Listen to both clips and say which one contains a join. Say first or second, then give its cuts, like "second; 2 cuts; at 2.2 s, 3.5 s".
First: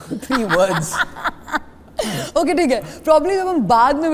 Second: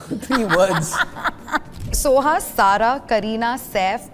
second; 1 cut; at 1.9 s